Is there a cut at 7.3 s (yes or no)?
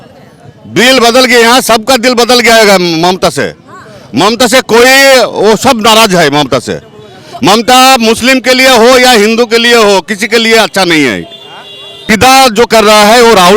no